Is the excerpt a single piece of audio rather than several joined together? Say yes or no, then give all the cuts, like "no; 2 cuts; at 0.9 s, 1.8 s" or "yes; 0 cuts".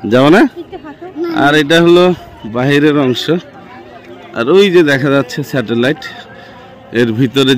yes; 0 cuts